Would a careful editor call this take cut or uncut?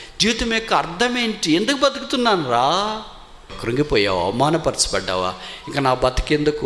cut